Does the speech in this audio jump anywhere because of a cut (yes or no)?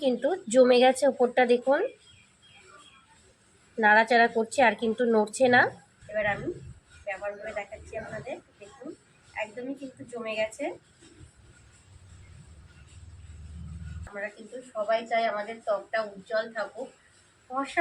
yes